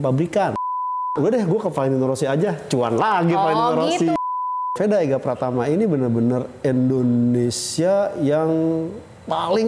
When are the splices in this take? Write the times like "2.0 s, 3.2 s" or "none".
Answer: 1.1 s, 4.7 s

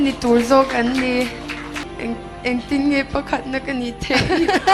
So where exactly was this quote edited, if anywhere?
1.8 s

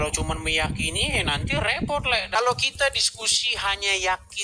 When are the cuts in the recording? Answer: 2.4 s

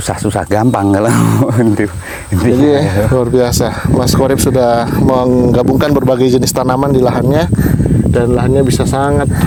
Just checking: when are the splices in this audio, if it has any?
none

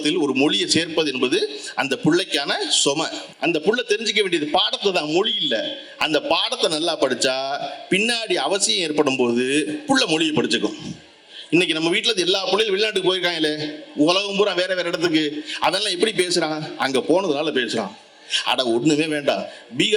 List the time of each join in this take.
3.2 s

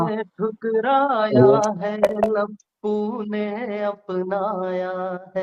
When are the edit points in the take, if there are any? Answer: none

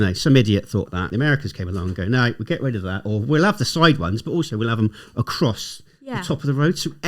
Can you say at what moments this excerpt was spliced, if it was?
1.1 s

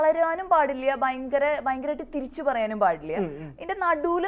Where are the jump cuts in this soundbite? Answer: none

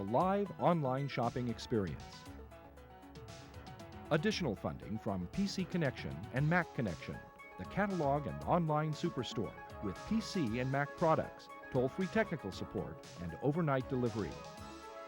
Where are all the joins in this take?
2.0 s, 3.9 s

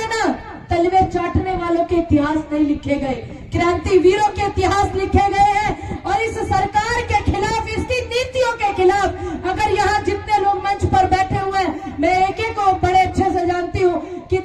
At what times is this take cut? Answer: none

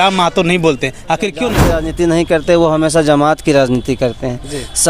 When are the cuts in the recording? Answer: 1.8 s

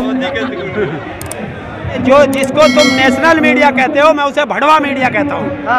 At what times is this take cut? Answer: 2.0 s

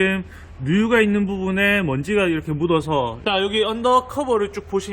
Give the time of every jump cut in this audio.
3.2 s

